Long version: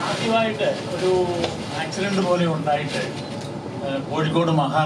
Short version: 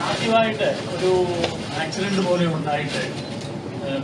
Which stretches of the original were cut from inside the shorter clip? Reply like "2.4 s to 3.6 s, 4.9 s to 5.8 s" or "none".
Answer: none